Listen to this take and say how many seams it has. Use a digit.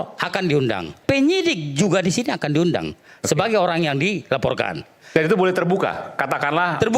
1